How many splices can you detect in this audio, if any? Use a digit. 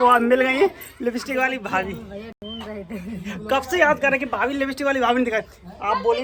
0